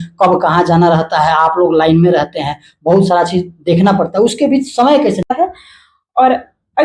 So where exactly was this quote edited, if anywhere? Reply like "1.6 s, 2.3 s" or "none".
5.3 s